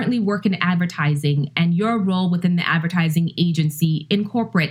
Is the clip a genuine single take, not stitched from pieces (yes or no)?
yes